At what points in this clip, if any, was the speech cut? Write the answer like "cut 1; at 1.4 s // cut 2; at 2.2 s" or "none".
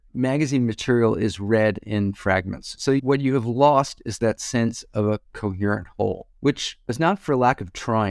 none